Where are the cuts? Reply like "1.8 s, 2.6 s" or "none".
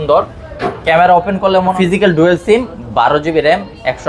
1.7 s